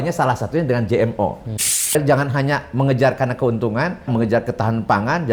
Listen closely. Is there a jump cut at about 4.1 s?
yes; 2 cuts; at 1.9 s, 4.1 s

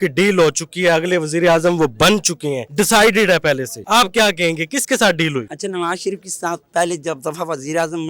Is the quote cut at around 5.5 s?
yes; 3 cuts; at 2.6 s, 3.7 s, 5.5 s

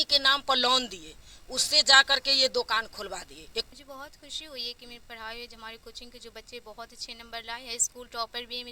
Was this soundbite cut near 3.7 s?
yes; 1 cut; at 3.7 s

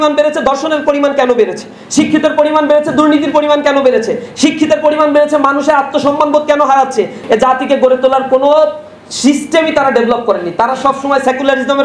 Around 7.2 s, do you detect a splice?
yes; 1 cut; at 7.2 s

